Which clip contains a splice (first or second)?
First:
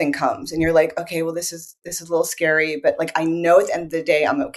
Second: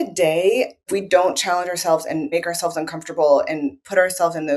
second